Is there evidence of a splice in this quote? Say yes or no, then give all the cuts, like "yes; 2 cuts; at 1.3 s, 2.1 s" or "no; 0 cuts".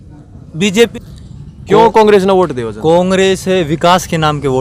yes; 1 cut; at 0.9 s